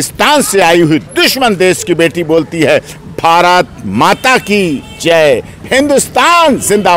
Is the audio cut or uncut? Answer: uncut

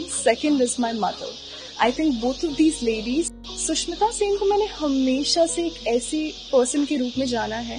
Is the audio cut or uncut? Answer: cut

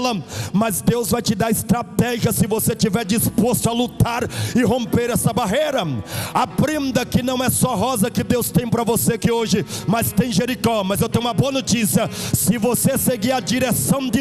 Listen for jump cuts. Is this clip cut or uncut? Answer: uncut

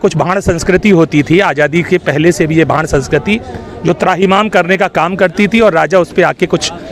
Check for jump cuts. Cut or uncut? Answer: uncut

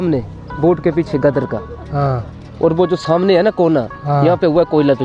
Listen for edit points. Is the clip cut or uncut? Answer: uncut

